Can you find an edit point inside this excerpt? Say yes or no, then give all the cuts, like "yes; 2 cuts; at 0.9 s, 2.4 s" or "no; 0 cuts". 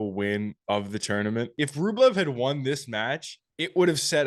no; 0 cuts